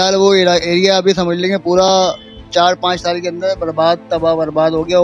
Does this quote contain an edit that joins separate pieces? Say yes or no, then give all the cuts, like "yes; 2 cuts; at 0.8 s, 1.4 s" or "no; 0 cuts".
no; 0 cuts